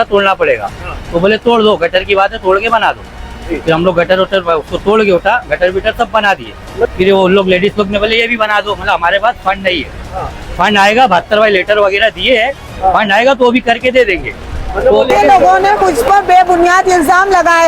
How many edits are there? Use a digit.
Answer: 2